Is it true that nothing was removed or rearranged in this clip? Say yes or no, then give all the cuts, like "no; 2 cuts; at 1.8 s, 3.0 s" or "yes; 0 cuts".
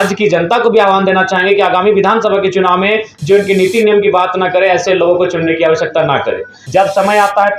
no; 1 cut; at 6.5 s